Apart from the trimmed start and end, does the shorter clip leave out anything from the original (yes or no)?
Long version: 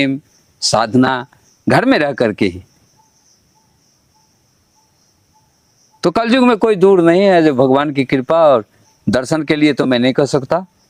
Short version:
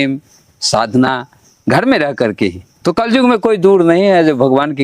yes